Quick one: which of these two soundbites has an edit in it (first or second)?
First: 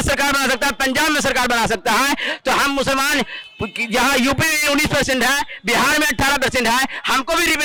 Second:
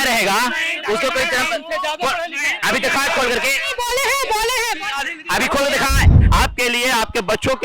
second